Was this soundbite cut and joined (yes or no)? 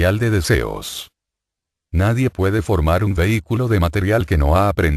yes